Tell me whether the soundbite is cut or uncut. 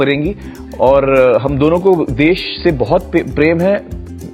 uncut